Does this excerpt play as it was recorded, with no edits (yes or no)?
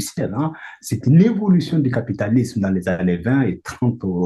yes